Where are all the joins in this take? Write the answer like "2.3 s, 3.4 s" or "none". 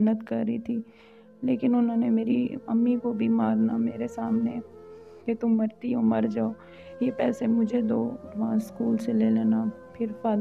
8.3 s